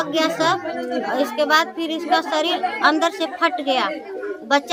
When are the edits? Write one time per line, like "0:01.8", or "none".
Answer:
none